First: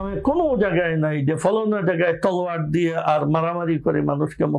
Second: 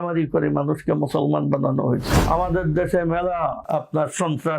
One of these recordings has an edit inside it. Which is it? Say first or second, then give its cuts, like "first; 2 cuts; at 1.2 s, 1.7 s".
second; 2 cuts; at 2.1 s, 3.6 s